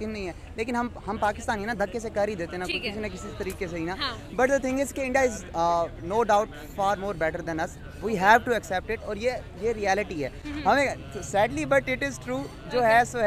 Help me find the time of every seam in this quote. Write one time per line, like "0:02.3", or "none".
none